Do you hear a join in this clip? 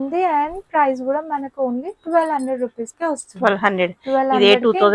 no; 0 cuts

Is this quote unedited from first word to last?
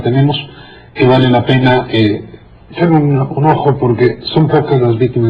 no; 1 cut; at 4.4 s

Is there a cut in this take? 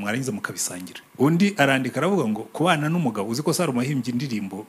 yes; 1 cut; at 1.0 s

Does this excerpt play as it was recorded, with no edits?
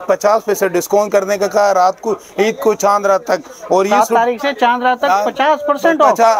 yes; 0 cuts

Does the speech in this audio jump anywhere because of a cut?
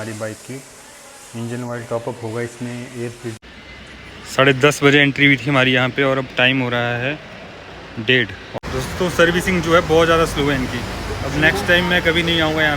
yes; 2 cuts; at 3.6 s, 8.6 s

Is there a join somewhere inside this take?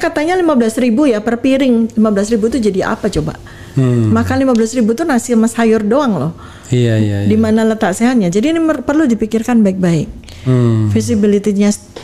no; 0 cuts

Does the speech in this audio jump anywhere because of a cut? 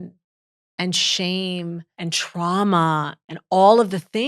yes; 2 cuts; at 1.9 s, 3.2 s

